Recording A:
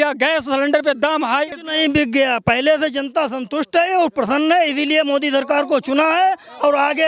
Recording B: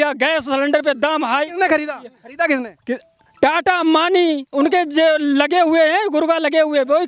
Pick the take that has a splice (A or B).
A